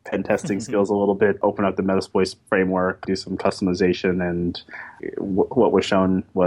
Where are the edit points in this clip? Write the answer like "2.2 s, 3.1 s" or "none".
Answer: 1.4 s, 3.0 s, 5.0 s